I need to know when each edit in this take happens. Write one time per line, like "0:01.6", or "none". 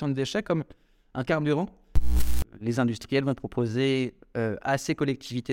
0:02.2